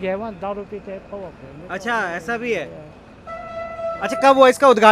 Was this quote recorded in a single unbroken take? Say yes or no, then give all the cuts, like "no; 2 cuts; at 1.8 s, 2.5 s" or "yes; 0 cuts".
yes; 0 cuts